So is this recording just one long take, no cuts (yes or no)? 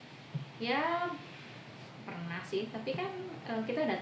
yes